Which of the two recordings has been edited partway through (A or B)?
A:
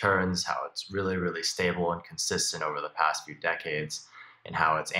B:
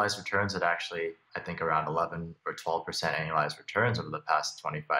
B